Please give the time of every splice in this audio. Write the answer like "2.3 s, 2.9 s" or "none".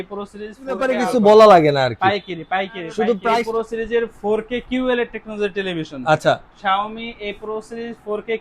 0.9 s, 3.4 s